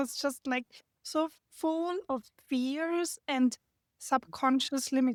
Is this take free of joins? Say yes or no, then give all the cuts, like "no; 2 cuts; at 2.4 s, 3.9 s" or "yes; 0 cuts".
yes; 0 cuts